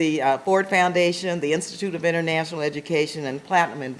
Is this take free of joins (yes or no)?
no